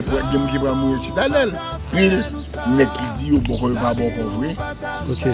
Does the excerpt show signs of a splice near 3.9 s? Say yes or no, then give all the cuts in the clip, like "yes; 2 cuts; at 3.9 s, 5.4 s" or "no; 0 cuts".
no; 1 cut; at 1.8 s